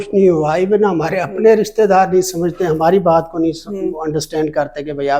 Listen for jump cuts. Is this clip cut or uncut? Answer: uncut